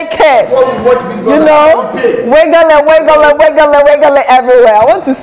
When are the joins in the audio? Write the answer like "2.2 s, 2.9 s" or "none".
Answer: none